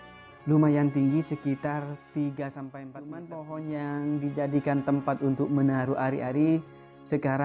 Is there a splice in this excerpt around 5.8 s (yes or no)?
no